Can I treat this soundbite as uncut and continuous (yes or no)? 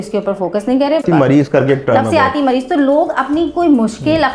no